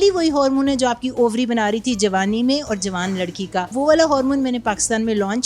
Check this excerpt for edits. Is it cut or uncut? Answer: cut